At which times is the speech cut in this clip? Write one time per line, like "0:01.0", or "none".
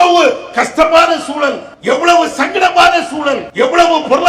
0:01.7
0:03.4